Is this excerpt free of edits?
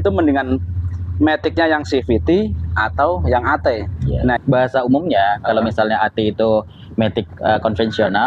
no; 1 cut; at 4.4 s

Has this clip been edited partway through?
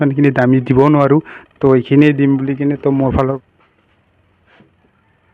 yes; 1 cut; at 3.4 s

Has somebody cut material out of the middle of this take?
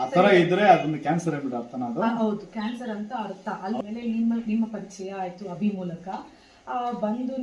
yes; 1 cut; at 3.8 s

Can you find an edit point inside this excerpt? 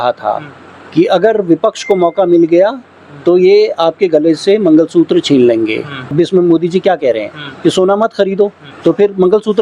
yes; 2 cuts; at 6.0 s, 8.6 s

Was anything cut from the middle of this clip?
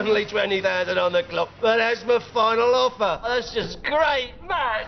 no; 0 cuts

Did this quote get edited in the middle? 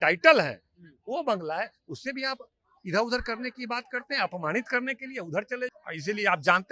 yes; 1 cut; at 5.7 s

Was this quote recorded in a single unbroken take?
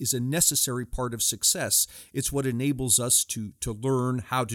yes; 0 cuts

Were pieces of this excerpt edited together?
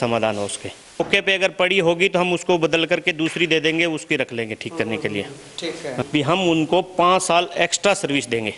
yes; 2 cuts; at 1.0 s, 6.0 s

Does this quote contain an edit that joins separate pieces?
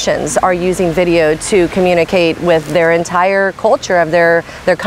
no; 0 cuts

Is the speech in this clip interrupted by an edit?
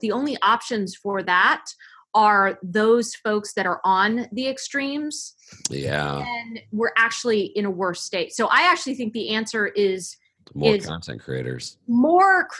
no; 0 cuts

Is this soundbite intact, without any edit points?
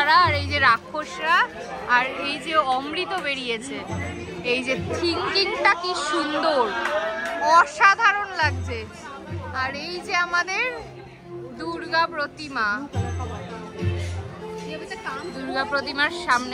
yes; 0 cuts

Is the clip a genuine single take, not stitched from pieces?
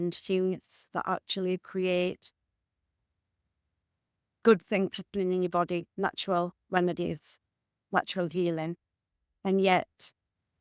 no; 1 cut; at 5.9 s

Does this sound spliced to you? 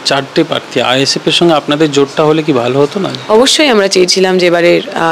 no; 0 cuts

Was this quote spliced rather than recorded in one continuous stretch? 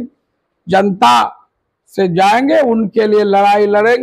no; 0 cuts

